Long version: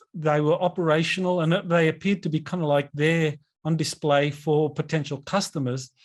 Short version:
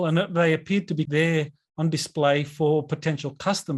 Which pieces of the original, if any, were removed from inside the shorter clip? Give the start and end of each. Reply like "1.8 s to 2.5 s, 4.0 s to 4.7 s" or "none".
2.4 s to 3.0 s